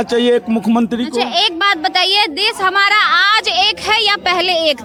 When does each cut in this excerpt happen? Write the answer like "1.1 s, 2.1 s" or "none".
none